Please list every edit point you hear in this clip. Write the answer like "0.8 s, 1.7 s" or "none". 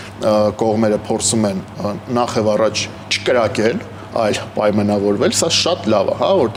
none